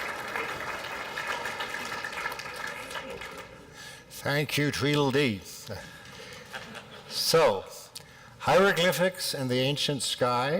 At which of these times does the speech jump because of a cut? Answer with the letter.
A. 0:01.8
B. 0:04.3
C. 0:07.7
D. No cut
B